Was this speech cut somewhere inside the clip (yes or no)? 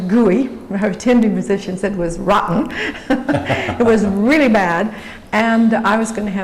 no